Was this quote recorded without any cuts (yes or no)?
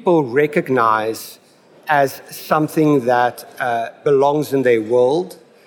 no